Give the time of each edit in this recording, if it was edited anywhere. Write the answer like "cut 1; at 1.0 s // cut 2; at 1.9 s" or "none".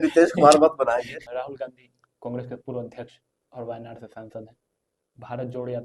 cut 1; at 1.1 s